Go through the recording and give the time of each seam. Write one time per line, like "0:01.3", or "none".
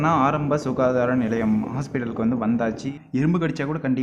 0:03.0